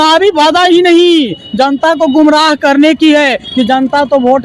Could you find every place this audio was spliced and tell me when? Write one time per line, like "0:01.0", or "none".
none

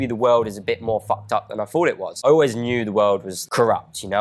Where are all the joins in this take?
0:02.1
0:03.3

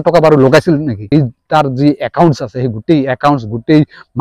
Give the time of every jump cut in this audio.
0:01.1

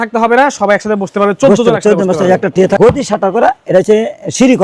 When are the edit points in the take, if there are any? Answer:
0:02.8

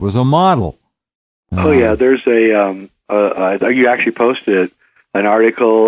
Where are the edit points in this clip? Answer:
0:02.4

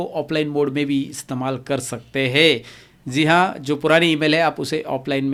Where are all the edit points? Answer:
none

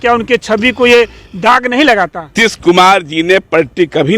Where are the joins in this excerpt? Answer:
0:02.3

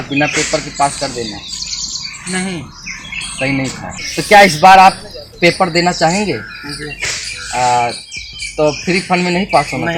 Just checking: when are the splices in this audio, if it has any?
0:03.9

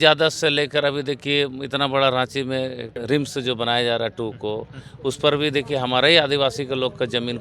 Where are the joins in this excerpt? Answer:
0:02.9

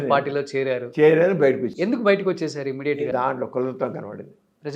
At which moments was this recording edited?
0:03.1

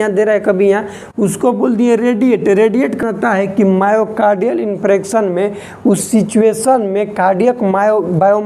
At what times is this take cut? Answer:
0:03.0

